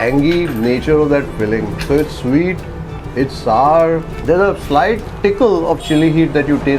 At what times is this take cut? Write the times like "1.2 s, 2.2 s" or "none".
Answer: 4.1 s, 5.1 s